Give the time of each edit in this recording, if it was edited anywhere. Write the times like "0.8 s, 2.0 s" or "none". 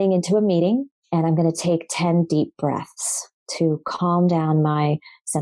1.0 s